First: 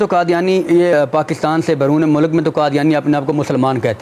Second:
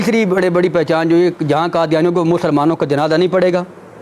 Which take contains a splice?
first; 1 cut; at 0.9 s

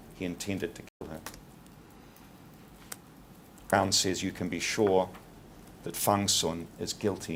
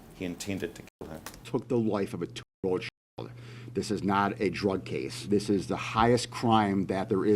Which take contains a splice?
second; 2 cuts; at 1.4 s, 5.2 s

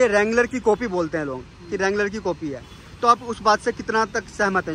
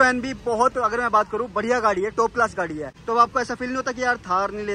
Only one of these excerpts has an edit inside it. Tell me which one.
second; 1 cut; at 2.9 s

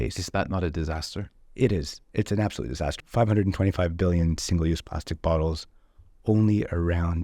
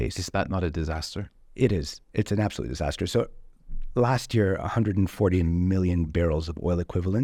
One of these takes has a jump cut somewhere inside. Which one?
first; 1 cut; at 2.9 s

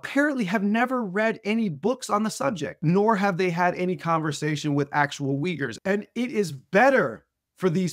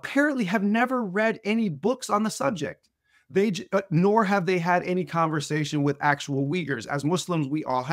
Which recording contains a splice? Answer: first; 2 cuts; at 2.8 s, 5.8 s

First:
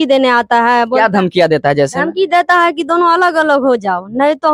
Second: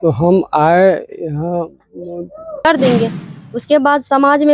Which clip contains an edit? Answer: second; 1 cut; at 2.7 s

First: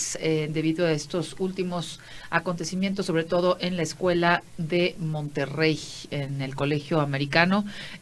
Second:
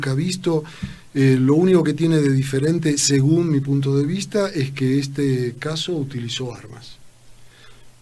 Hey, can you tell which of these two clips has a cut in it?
second; 1 cut; at 6.2 s

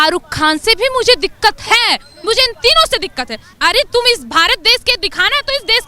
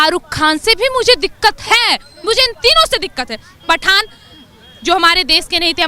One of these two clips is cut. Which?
first; 1 cut; at 3.5 s

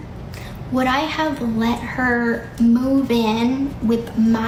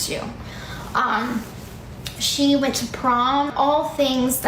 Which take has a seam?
second; 1 cut; at 3.5 s

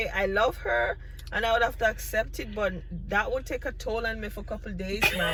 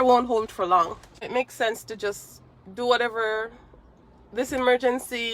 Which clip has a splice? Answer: second; 1 cut; at 1.3 s

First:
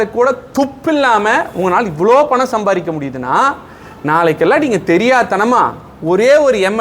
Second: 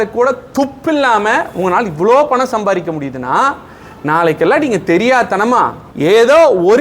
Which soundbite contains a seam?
second; 1 cut; at 5.8 s

